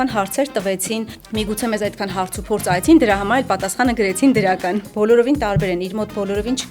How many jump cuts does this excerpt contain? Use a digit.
2